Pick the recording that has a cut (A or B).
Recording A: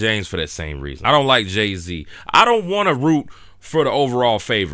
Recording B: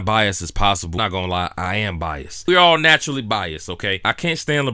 B